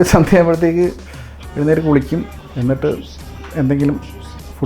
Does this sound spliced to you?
yes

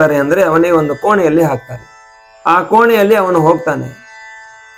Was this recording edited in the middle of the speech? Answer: no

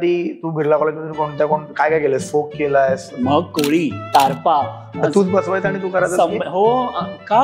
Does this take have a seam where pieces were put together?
yes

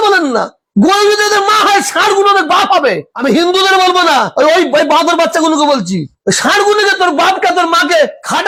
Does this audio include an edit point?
no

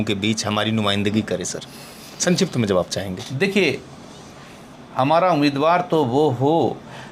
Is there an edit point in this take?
no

